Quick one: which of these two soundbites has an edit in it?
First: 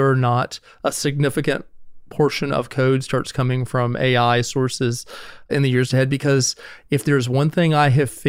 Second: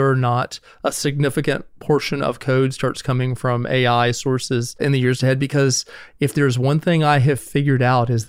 second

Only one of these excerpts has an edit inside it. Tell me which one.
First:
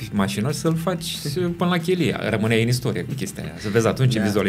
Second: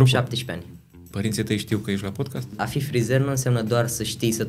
second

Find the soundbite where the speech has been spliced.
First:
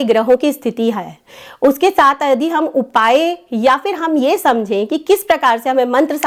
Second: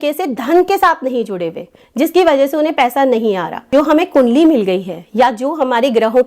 second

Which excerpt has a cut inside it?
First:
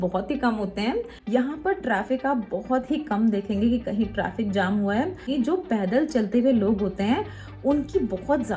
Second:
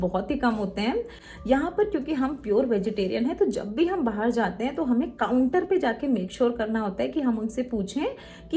first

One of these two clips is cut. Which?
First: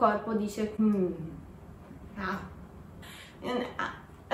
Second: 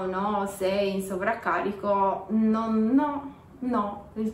first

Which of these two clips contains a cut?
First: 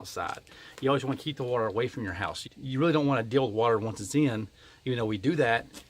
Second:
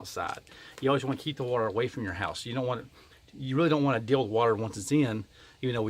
first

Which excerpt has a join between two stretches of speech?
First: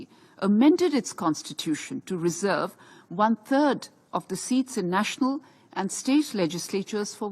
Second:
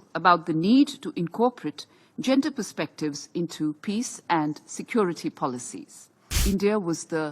second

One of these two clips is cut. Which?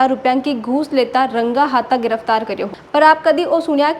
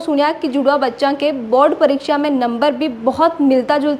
first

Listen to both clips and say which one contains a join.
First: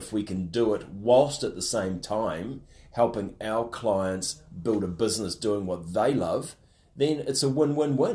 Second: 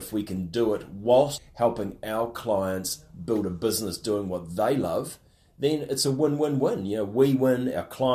second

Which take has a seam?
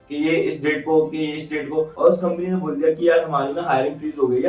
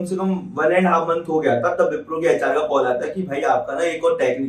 first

